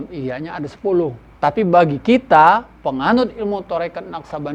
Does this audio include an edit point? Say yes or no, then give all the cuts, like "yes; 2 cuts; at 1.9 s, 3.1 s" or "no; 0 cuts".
yes; 1 cut; at 1.2 s